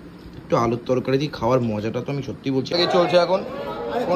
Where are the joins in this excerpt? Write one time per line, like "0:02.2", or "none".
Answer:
0:02.7